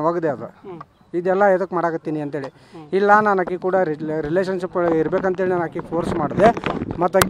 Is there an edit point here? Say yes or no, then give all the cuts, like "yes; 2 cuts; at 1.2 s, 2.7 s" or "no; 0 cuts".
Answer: no; 0 cuts